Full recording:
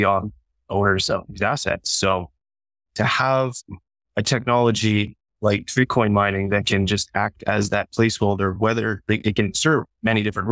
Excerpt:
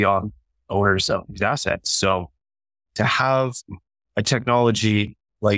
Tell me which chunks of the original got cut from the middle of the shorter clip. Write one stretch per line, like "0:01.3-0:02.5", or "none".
none